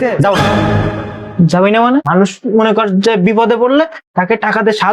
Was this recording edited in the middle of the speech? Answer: yes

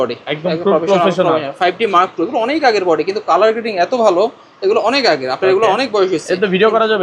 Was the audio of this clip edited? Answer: no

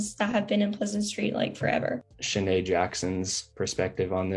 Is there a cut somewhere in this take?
yes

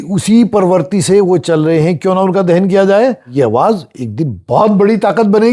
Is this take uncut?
no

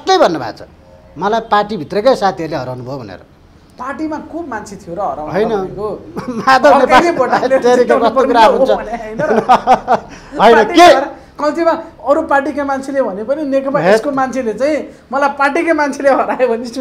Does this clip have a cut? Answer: no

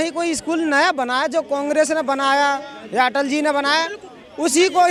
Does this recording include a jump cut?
no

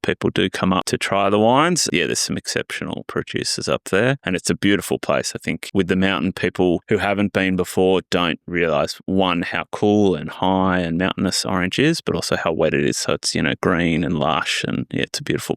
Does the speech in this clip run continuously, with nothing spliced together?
no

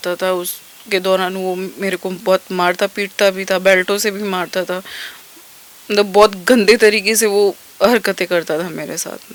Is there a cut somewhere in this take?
no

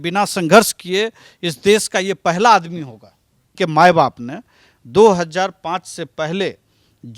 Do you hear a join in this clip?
yes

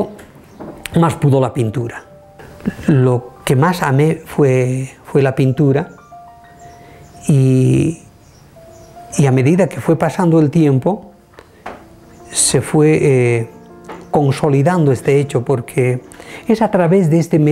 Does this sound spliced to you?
yes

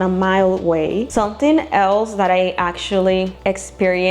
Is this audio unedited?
no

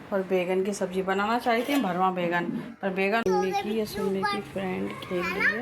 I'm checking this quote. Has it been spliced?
yes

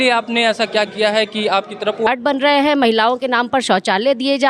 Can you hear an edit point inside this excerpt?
yes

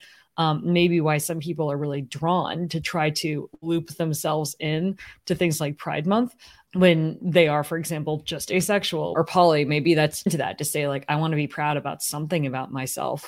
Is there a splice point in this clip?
yes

